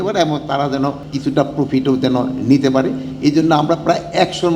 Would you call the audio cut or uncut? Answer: cut